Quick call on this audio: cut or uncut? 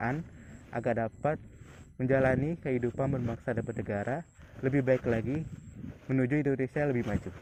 uncut